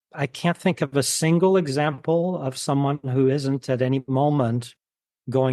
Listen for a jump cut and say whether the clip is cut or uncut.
uncut